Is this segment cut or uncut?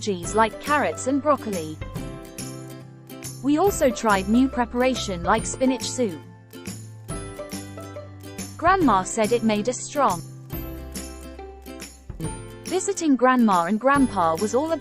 cut